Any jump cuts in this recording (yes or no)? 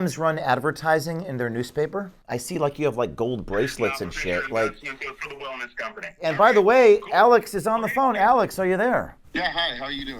yes